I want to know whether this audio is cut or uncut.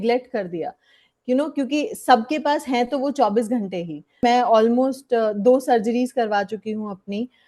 cut